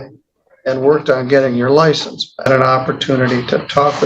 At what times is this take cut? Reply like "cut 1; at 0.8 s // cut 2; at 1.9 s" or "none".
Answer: cut 1; at 2.5 s